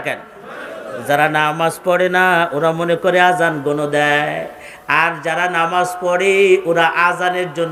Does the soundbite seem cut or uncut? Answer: uncut